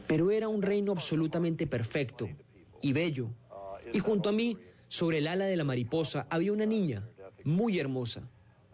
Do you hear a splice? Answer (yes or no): no